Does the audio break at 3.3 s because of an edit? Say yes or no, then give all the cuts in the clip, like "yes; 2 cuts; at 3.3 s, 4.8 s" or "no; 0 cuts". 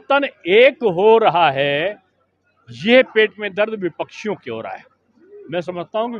no; 0 cuts